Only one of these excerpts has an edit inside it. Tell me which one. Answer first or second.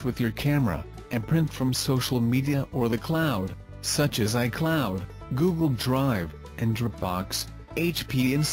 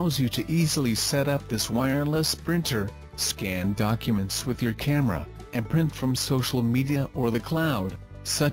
first